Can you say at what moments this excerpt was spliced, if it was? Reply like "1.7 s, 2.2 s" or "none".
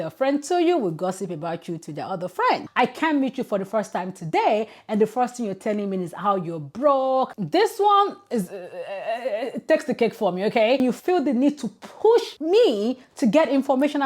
2.7 s, 7.3 s, 10.8 s